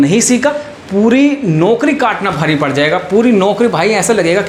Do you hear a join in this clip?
no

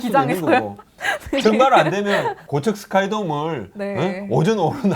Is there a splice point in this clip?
yes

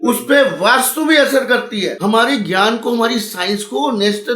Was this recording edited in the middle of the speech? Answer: yes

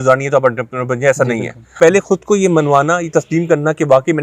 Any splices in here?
yes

